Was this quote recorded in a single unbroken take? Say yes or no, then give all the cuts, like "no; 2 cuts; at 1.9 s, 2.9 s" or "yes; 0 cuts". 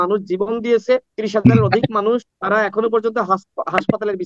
no; 2 cuts; at 1.2 s, 2.3 s